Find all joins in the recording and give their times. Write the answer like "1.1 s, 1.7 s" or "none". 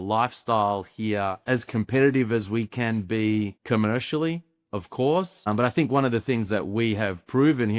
1.4 s, 3.6 s, 5.5 s